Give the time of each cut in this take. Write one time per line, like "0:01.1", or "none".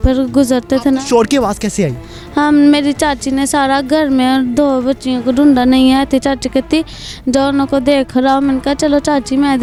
none